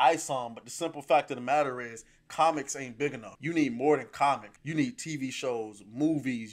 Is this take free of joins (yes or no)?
no